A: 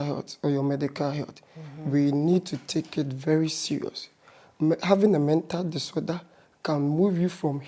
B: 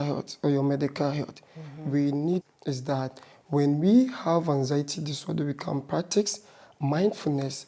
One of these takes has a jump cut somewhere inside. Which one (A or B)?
B